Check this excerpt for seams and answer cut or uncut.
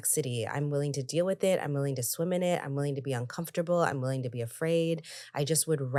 uncut